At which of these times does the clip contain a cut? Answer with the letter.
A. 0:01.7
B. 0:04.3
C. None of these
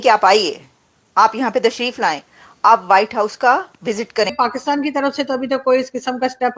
B